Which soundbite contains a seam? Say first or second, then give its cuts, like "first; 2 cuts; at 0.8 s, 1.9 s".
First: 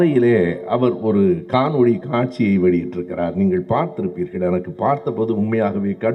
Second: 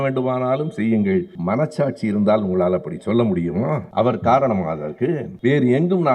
second; 3 cuts; at 1.3 s, 3.8 s, 5.3 s